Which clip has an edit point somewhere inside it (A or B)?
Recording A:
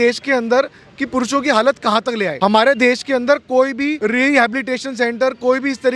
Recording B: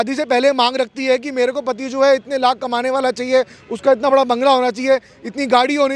A